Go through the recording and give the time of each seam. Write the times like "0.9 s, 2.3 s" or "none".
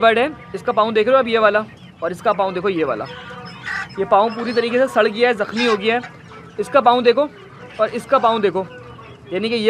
none